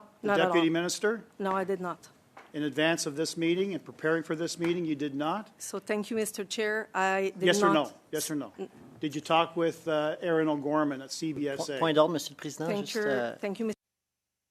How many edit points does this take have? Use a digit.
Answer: 0